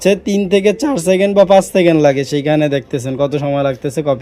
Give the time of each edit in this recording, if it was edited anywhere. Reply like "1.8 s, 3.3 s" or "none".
none